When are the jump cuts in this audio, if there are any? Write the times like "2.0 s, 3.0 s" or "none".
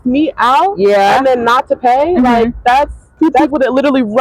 3.1 s